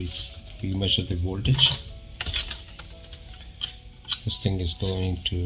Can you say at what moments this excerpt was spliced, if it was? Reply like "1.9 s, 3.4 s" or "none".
none